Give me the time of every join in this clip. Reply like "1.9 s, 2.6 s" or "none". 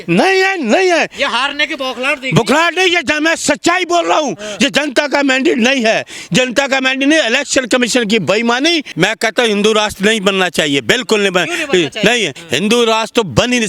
8.9 s, 12.4 s